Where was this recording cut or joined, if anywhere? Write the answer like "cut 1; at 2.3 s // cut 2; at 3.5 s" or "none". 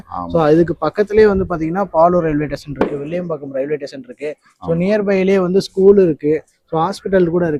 none